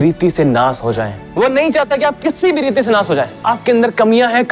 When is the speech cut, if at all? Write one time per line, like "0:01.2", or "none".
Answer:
0:01.2
0:03.3